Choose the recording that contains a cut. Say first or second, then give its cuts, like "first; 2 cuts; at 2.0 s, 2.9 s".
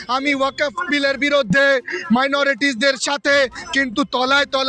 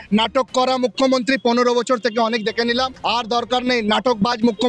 second; 1 cut; at 2.9 s